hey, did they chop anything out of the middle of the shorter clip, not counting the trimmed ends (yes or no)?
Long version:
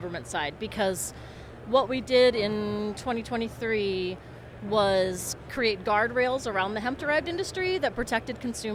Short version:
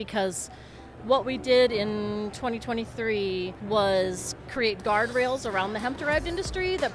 yes